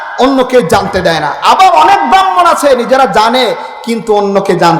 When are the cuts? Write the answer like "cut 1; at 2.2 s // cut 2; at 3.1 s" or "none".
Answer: none